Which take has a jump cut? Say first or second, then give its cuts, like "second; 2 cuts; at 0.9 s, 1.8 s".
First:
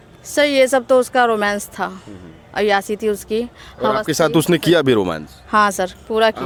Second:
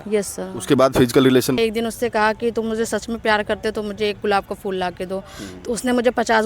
second; 1 cut; at 1.6 s